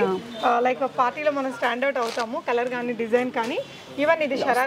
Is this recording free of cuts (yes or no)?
yes